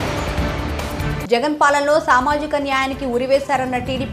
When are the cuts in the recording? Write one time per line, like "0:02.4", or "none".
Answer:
0:00.9